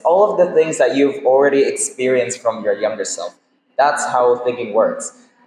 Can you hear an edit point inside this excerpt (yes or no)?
no